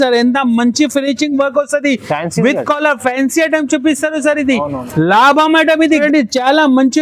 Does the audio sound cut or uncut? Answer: cut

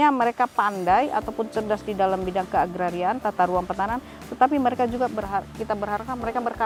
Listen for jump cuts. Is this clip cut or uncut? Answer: uncut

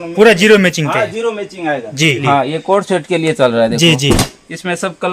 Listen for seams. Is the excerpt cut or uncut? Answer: cut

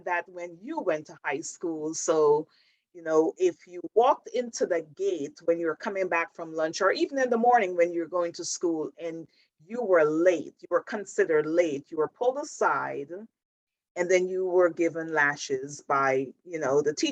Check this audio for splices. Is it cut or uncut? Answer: uncut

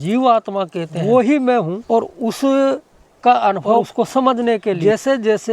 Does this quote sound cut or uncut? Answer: cut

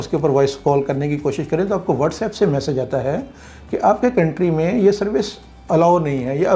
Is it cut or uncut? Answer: uncut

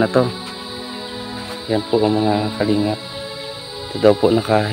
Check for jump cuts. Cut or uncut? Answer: uncut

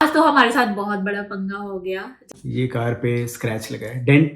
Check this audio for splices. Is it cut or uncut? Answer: cut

